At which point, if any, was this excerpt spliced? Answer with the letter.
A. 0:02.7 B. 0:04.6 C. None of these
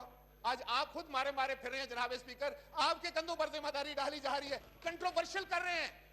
B